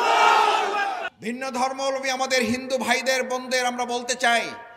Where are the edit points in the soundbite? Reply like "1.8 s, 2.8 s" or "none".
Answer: 1.0 s